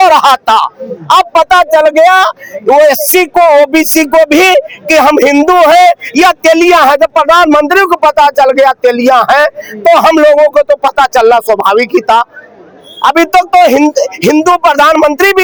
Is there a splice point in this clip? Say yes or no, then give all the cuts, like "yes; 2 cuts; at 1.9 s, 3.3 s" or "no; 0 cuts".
no; 0 cuts